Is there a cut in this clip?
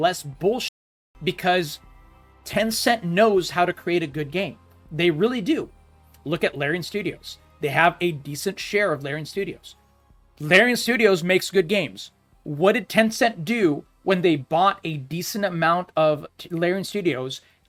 no; 0 cuts

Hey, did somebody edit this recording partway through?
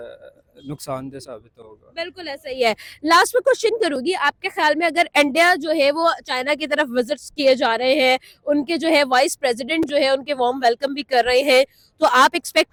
no; 0 cuts

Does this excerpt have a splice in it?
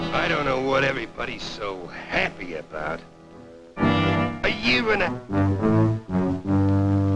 no; 0 cuts

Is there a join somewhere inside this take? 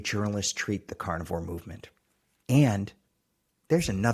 no; 0 cuts

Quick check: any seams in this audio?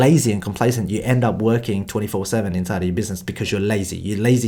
no; 0 cuts

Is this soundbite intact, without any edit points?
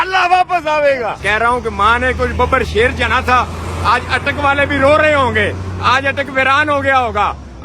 no; 1 cut; at 1.2 s

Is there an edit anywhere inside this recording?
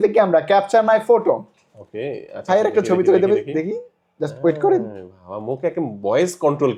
no; 0 cuts

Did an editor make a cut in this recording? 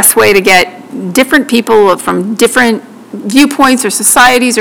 no; 0 cuts

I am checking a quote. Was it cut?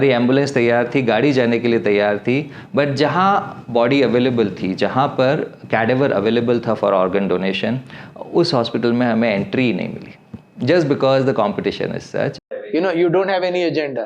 yes; 1 cut; at 12.4 s

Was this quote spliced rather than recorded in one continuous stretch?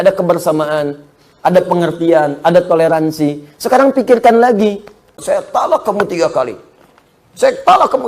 yes; 1 cut; at 5.1 s

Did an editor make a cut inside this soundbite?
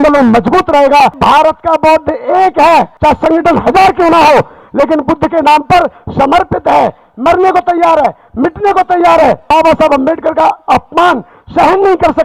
yes; 3 cuts; at 1.2 s, 2.9 s, 9.5 s

